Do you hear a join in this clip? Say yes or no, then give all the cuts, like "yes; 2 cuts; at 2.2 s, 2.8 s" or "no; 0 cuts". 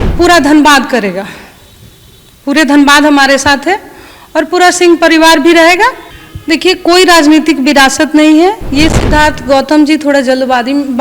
yes; 1 cut; at 6.1 s